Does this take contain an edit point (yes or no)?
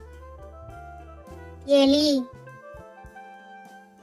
yes